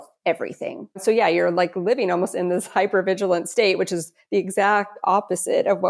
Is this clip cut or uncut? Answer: cut